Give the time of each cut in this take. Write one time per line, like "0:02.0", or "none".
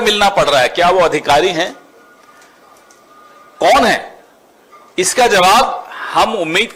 none